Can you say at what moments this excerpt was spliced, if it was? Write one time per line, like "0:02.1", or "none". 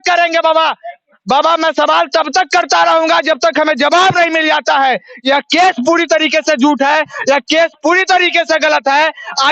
none